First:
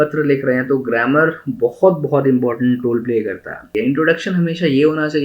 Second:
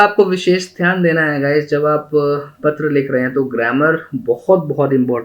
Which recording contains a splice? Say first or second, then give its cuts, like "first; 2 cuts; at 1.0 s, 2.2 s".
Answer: first; 1 cut; at 3.7 s